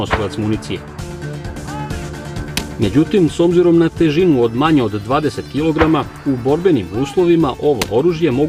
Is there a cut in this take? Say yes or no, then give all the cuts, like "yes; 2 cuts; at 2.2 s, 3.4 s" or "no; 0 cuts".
no; 0 cuts